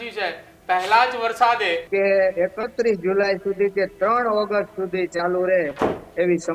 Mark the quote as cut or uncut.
cut